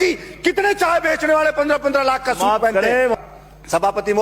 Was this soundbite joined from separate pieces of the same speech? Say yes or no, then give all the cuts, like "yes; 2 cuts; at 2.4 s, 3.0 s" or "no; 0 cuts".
yes; 1 cut; at 3.2 s